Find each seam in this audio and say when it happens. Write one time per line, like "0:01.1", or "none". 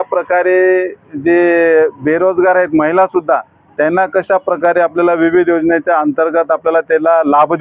none